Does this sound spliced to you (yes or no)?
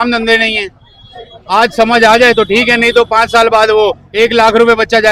no